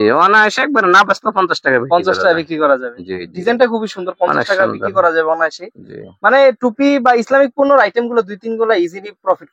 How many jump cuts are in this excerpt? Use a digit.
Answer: 0